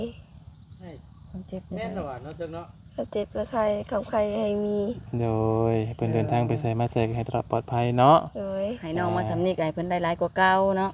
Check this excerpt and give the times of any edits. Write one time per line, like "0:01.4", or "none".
none